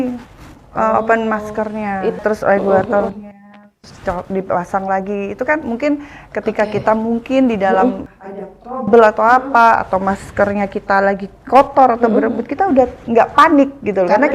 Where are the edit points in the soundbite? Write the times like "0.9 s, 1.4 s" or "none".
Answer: 2.2 s, 8.1 s